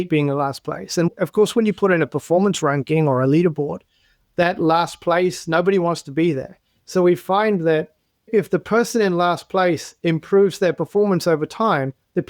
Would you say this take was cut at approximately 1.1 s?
yes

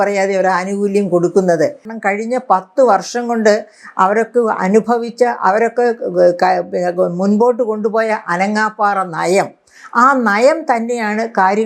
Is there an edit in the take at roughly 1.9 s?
yes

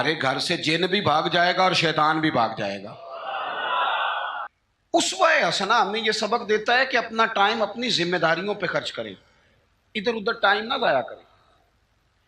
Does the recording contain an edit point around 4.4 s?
yes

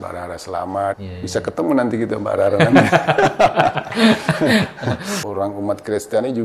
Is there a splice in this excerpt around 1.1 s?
yes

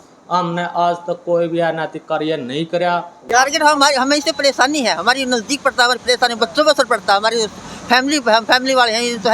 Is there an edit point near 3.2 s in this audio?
yes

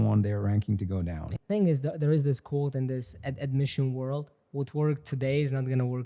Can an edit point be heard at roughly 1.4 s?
yes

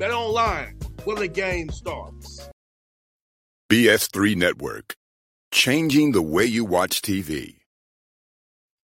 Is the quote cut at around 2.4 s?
yes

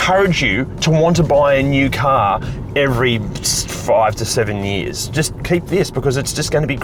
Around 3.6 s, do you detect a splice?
no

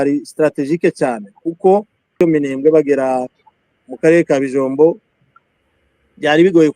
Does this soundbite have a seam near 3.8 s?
no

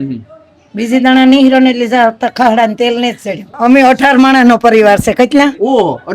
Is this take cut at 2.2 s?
no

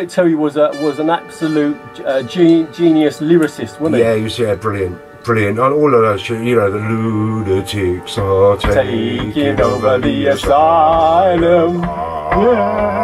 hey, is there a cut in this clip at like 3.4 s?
no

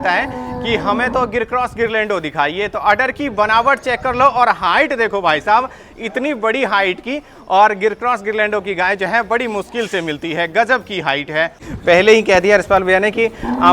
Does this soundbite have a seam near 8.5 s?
no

